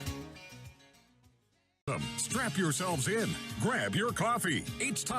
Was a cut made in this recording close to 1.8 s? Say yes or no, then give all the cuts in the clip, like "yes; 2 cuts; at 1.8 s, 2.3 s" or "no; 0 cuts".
yes; 1 cut; at 1.8 s